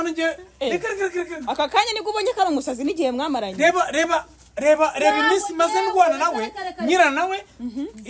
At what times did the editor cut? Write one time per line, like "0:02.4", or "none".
none